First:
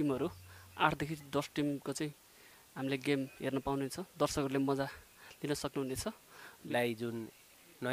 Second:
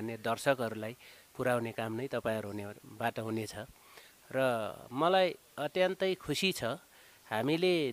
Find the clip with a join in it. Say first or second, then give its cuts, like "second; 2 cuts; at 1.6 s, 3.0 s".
first; 1 cut; at 6.5 s